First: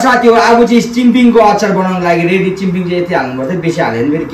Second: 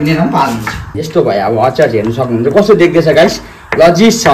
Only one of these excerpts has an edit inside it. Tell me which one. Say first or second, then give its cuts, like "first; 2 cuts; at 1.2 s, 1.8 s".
second; 1 cut; at 0.9 s